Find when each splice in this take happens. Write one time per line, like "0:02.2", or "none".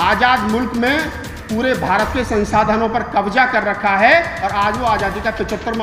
none